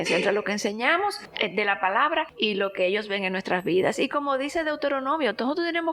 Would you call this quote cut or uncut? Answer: cut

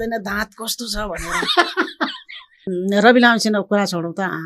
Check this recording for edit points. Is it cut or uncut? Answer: cut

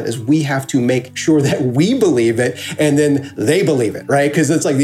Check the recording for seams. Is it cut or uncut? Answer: cut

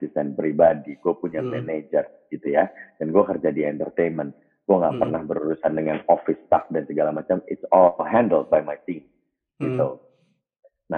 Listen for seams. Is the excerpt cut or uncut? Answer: uncut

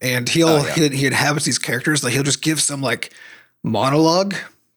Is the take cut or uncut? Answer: uncut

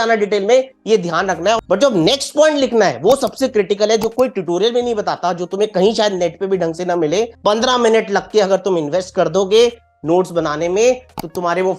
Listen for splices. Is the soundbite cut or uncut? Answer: cut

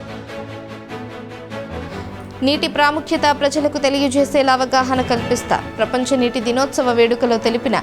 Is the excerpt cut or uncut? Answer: cut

